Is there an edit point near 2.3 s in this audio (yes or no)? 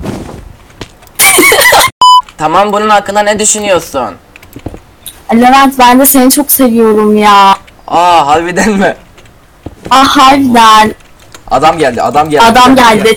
yes